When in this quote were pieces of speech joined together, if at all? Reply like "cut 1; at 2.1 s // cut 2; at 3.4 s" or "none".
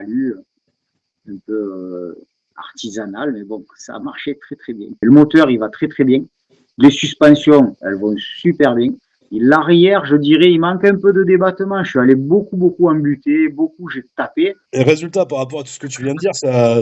cut 1; at 4.9 s // cut 2; at 14.6 s